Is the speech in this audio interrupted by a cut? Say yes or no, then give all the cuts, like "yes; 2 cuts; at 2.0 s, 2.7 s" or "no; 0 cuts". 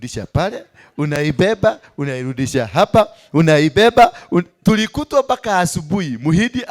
no; 0 cuts